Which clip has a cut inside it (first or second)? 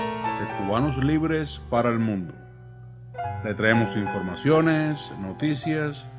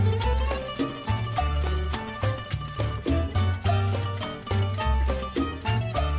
second